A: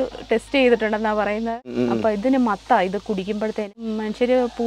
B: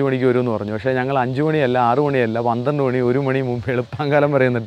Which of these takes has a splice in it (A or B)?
A